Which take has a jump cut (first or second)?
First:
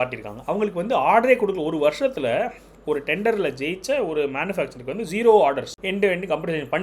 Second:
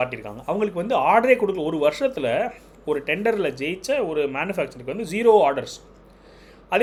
first